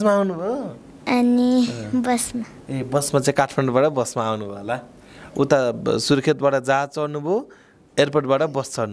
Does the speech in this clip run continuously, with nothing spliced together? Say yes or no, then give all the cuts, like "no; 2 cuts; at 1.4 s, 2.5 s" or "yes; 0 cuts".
yes; 0 cuts